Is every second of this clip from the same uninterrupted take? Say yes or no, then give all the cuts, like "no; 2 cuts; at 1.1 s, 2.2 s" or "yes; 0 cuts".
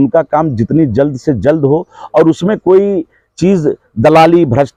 yes; 0 cuts